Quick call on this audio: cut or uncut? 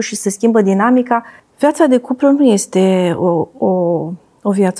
cut